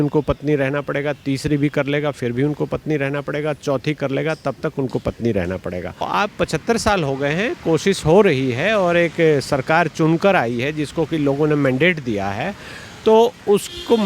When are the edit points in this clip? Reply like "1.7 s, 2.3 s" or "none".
6.0 s